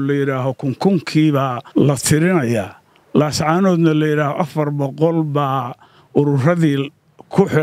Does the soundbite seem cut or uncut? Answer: cut